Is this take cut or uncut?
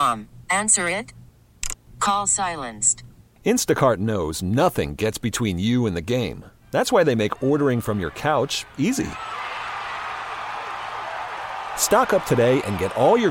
uncut